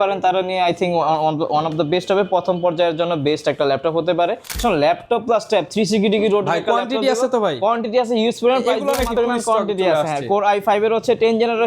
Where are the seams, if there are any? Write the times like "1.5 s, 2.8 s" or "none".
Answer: 4.6 s, 9.1 s